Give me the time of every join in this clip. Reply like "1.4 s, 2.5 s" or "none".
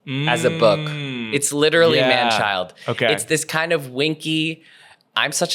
1.1 s